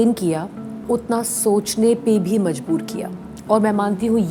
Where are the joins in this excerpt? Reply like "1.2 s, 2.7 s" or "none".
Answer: none